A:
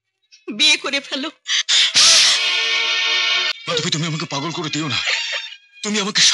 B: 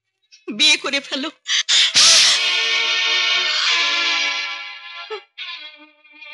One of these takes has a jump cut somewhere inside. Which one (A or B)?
A